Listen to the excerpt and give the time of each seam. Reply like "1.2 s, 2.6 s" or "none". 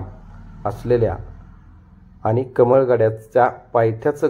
none